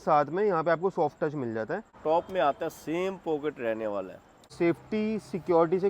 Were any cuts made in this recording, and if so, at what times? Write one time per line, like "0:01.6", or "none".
0:01.9
0:04.4